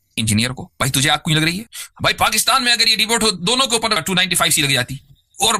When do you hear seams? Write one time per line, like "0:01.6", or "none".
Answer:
0:01.8
0:04.0